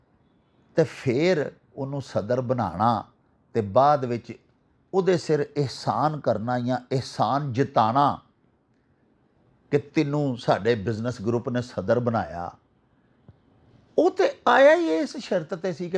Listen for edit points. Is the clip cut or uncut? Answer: uncut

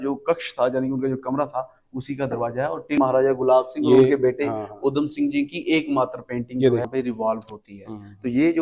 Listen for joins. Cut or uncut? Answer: cut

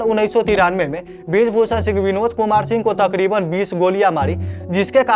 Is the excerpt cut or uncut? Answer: uncut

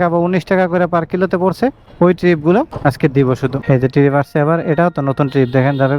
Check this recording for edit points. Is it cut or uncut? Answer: uncut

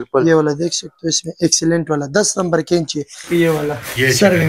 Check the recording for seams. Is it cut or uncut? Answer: cut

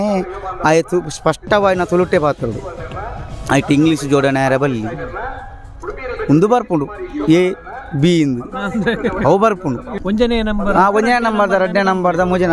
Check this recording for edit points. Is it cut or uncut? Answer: cut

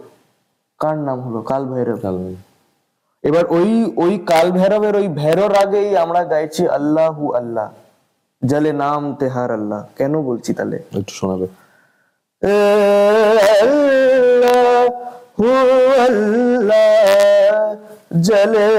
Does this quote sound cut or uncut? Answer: uncut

